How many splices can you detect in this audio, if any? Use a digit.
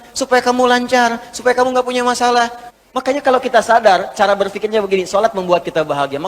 1